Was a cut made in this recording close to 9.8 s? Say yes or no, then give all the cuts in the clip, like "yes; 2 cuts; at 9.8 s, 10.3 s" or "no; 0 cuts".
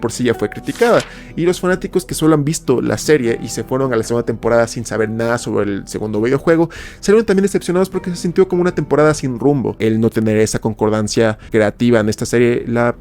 yes; 1 cut; at 9.8 s